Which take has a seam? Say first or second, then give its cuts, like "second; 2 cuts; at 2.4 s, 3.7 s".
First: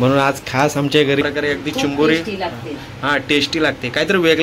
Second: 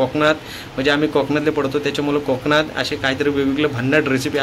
first; 1 cut; at 1.2 s